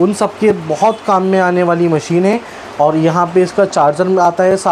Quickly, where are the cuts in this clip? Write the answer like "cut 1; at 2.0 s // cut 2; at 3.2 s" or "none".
none